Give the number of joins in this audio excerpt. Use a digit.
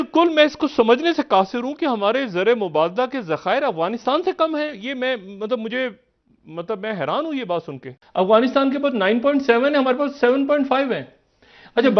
1